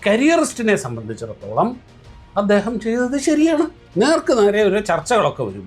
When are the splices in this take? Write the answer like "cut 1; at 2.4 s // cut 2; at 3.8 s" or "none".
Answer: cut 1; at 3.8 s